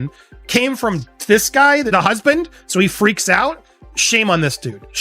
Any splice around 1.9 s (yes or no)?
yes